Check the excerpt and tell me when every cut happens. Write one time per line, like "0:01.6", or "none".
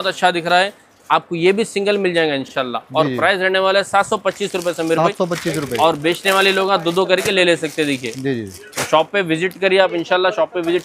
none